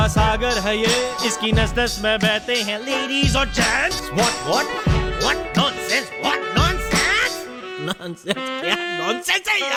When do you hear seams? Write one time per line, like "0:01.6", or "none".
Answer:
none